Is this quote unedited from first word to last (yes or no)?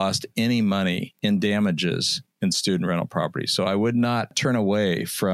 no